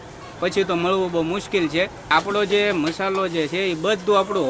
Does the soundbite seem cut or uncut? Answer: cut